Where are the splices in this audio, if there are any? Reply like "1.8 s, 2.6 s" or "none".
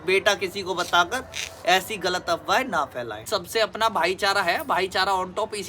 3.3 s